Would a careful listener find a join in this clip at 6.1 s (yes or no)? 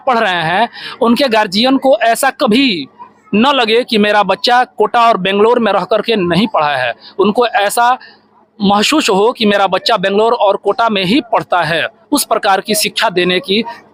no